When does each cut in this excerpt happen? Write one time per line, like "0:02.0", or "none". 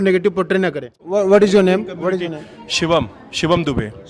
0:01.0